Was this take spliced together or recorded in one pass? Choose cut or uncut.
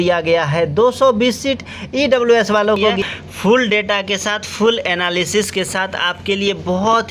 cut